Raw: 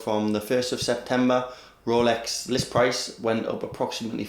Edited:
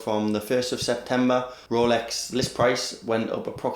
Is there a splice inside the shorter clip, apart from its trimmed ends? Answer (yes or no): yes